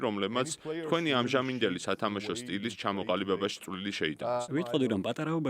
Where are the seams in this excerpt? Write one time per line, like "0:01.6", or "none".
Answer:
0:04.4